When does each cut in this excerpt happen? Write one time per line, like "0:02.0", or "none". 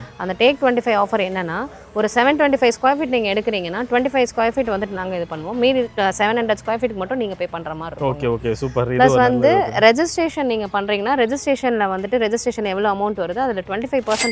none